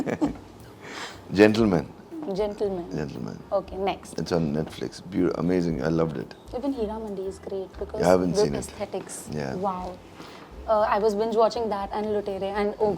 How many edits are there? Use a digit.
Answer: 0